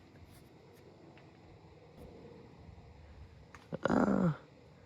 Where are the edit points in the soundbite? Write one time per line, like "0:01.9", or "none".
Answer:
0:02.0